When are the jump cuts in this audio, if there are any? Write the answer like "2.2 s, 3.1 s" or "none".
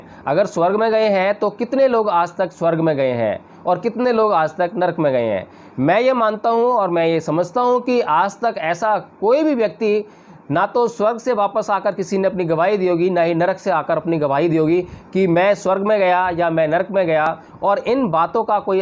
none